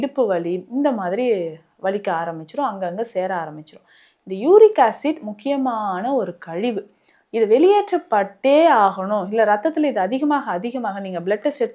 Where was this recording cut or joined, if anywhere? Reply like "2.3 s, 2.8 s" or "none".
none